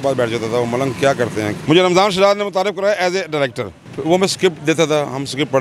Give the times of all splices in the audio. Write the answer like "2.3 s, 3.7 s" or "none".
1.6 s, 3.9 s